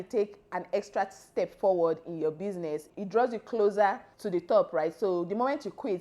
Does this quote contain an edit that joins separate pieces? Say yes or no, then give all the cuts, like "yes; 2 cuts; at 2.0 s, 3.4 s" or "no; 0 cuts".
yes; 2 cuts; at 2.9 s, 4.1 s